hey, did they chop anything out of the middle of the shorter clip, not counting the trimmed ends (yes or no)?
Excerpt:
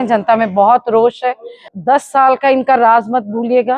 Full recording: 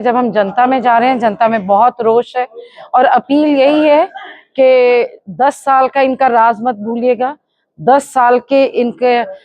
yes